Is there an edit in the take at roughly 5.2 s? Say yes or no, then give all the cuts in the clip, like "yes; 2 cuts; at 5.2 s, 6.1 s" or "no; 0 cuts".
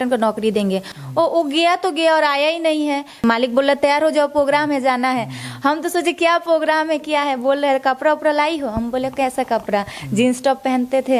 no; 2 cuts; at 0.9 s, 3.2 s